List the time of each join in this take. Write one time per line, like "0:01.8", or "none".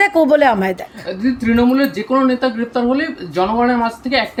none

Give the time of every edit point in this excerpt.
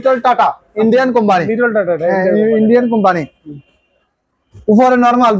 none

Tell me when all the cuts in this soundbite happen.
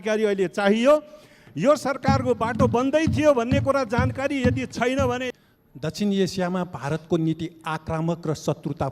0:05.3

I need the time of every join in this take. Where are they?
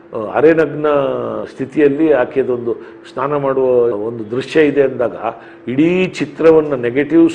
none

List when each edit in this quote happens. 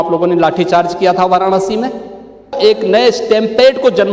0:02.6

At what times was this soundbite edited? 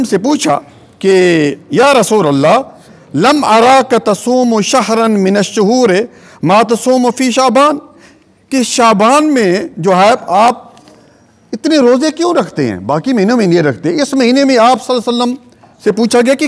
none

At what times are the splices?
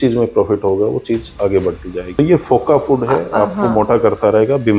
0:02.1

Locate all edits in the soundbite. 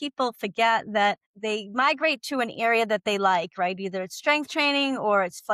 0:01.3

